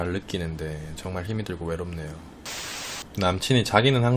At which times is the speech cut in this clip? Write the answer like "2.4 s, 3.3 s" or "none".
2.8 s